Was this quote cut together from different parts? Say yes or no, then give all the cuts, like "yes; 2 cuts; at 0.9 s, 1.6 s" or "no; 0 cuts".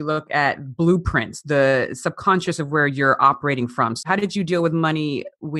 yes; 1 cut; at 4.0 s